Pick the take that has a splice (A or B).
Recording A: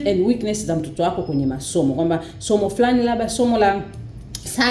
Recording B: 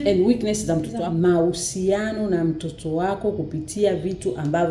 B